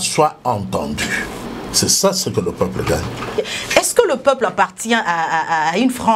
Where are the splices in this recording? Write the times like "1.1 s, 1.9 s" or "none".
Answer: 1.5 s, 3.3 s